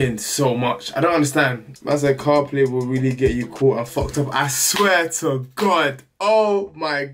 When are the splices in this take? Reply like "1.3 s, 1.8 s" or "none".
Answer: 1.7 s